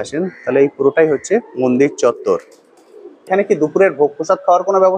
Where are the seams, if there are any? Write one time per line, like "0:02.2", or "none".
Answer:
0:03.3